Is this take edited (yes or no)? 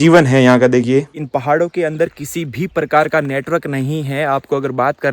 yes